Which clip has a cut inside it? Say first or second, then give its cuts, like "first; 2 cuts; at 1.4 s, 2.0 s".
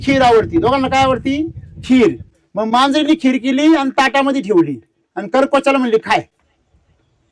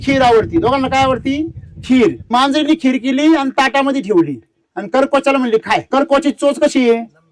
second; 2 cuts; at 2.3 s, 5.9 s